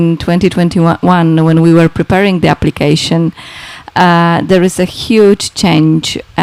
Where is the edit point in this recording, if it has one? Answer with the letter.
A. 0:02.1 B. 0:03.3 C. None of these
C